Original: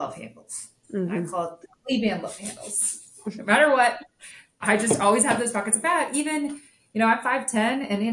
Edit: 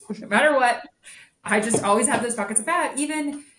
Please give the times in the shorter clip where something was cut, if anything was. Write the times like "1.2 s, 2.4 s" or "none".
none